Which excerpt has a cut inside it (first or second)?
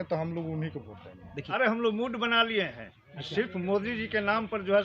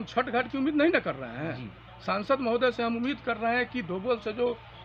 first